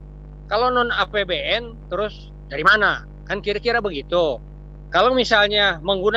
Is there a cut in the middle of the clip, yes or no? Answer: no